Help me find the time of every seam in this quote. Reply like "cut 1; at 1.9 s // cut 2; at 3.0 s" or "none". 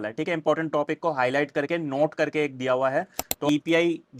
cut 1; at 3.3 s